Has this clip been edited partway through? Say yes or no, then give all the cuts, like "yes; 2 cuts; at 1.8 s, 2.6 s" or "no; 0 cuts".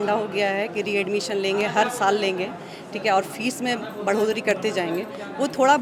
no; 0 cuts